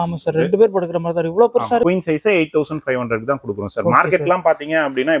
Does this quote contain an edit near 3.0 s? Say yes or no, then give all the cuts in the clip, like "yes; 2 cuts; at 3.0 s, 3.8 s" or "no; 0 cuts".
no; 1 cut; at 1.8 s